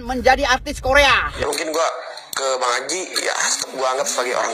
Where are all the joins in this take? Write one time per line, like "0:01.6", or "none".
0:01.3